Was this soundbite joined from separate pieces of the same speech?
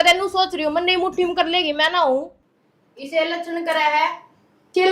yes; 1 cut; at 2.4 s

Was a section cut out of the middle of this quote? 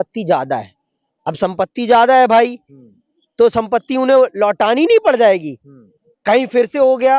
no; 0 cuts

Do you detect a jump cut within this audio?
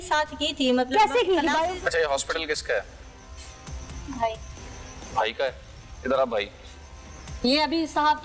yes; 1 cut; at 1.7 s

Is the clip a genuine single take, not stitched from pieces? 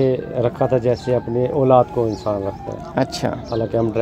yes; 0 cuts

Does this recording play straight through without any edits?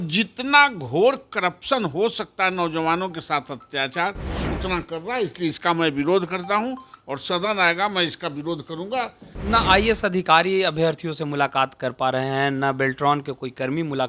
no; 1 cut; at 9.4 s

